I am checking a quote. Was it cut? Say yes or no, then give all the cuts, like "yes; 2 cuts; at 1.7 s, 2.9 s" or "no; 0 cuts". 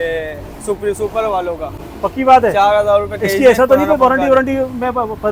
no; 0 cuts